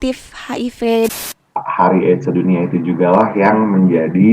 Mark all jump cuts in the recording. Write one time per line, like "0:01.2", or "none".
0:01.1